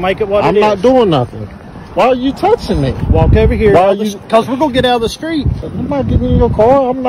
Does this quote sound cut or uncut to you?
cut